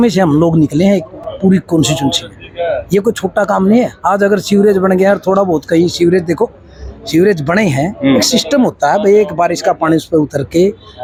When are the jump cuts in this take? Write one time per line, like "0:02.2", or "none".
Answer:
none